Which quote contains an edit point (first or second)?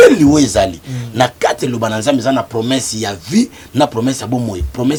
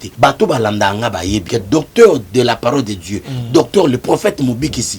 second